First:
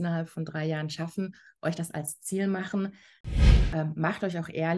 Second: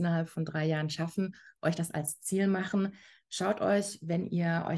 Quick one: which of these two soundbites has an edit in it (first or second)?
first